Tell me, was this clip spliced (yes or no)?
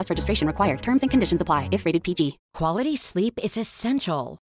yes